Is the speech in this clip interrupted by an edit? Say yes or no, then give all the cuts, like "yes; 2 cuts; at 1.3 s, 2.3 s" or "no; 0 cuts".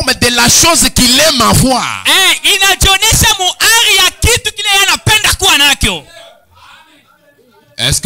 no; 0 cuts